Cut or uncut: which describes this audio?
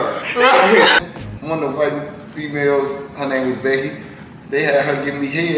cut